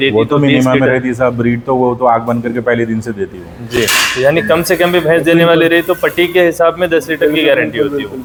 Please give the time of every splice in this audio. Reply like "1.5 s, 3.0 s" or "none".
none

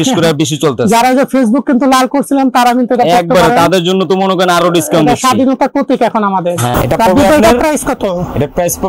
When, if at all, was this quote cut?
6.7 s

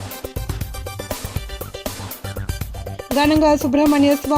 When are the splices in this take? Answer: none

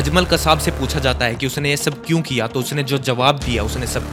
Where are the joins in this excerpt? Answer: none

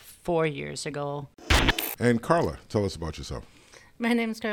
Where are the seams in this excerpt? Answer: 1.8 s

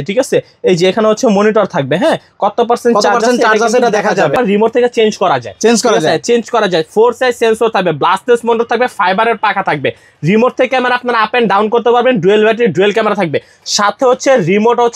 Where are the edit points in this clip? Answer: 4.4 s

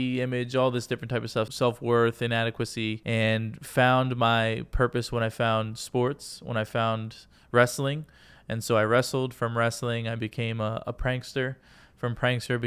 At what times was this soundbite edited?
1.5 s, 3.0 s

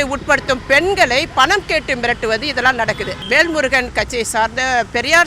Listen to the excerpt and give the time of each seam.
3.2 s

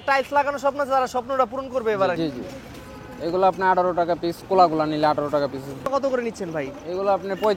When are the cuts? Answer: 2.2 s, 5.9 s

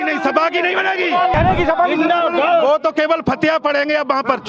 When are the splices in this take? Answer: 1.3 s

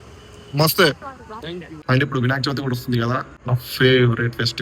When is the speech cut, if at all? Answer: 1.7 s, 3.3 s

